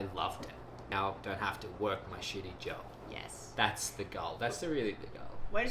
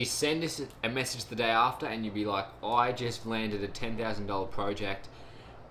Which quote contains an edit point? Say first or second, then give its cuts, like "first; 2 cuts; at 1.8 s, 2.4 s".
first; 1 cut; at 0.9 s